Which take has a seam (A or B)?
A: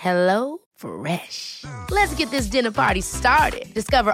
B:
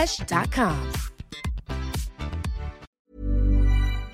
B